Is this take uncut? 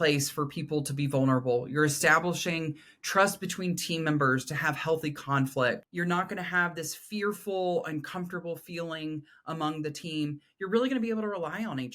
no; 1 cut; at 5.9 s

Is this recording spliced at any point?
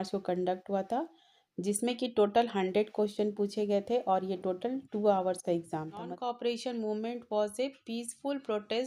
yes; 1 cut; at 6.1 s

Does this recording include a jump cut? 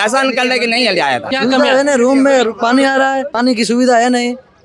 yes; 2 cuts; at 1.3 s, 3.3 s

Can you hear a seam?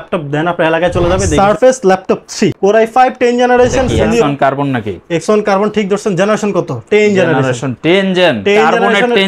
yes; 3 cuts; at 1.3 s, 2.6 s, 4.2 s

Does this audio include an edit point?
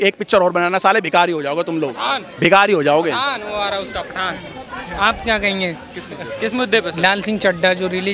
no; 0 cuts

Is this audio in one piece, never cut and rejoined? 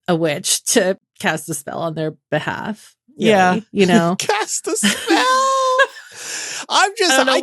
no; 1 cut; at 1.1 s

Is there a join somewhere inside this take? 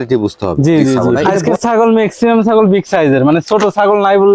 yes; 1 cut; at 1.4 s

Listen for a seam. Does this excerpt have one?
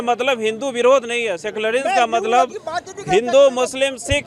no; 0 cuts

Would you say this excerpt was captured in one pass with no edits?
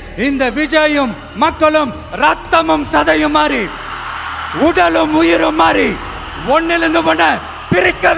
yes; 0 cuts

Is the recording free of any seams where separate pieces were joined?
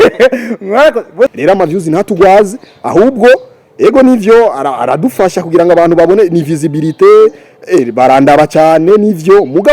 no; 1 cut; at 1.4 s

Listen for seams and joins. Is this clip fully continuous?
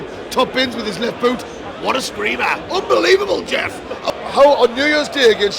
no; 1 cut; at 4.0 s

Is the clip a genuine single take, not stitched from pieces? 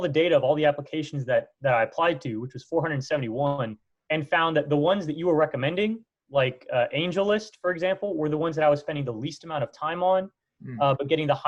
yes; 0 cuts

